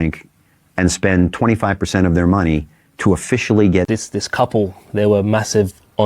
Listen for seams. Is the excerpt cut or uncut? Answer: cut